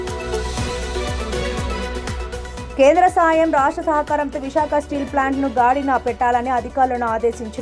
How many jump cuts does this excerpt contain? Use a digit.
2